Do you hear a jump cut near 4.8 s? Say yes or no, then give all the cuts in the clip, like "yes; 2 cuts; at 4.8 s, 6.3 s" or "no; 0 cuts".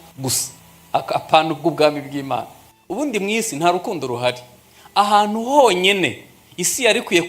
no; 1 cut; at 2.7 s